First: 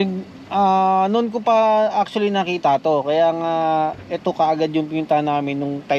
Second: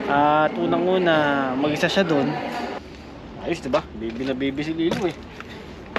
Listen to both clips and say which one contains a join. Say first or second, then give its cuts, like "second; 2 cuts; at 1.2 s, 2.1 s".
second; 1 cut; at 2.8 s